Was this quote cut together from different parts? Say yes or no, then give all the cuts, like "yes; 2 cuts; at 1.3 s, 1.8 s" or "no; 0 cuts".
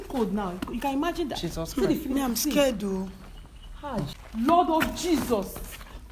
yes; 1 cut; at 4.1 s